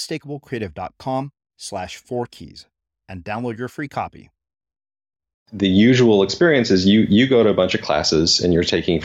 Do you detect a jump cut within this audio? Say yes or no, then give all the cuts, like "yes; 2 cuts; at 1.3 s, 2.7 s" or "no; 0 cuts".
yes; 1 cut; at 5.5 s